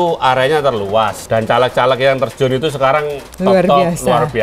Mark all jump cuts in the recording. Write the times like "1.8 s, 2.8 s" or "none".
1.2 s